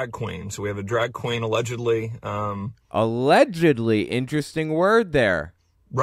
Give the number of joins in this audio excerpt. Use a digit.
0